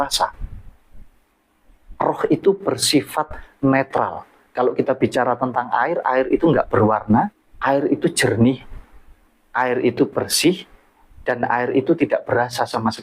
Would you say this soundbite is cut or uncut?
cut